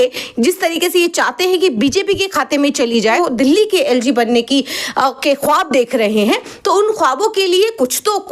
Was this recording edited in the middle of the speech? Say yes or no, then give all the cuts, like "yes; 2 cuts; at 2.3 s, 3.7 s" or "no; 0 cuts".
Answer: yes; 1 cut; at 3.2 s